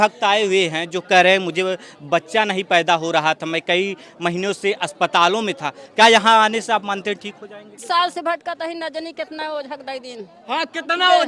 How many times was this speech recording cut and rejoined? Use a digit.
1